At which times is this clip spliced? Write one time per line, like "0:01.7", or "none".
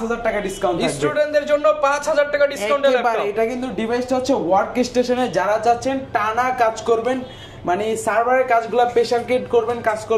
none